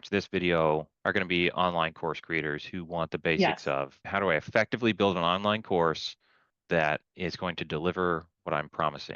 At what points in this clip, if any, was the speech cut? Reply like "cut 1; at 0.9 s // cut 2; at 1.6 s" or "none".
cut 1; at 0.9 s // cut 2; at 4.1 s